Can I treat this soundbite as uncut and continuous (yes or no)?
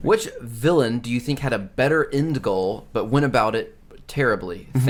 yes